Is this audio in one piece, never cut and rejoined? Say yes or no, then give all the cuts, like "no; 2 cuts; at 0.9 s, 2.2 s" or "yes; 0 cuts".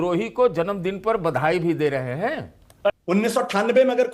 no; 1 cut; at 2.9 s